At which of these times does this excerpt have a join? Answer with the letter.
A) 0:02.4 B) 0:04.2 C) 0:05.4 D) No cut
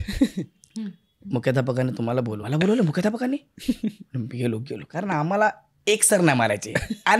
A